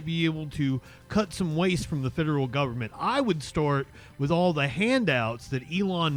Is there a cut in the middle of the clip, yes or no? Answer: no